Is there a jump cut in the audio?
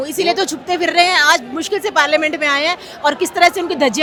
no; 0 cuts

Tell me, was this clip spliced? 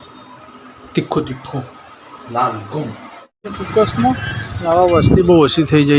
yes; 1 cut; at 3.5 s

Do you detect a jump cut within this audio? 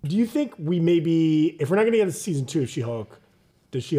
no; 0 cuts

